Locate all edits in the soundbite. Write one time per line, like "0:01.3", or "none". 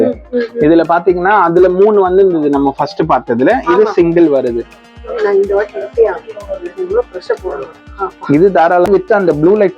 0:08.9